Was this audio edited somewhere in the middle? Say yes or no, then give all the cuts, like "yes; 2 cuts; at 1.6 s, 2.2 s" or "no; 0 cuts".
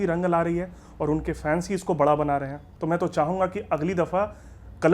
yes; 1 cut; at 2.6 s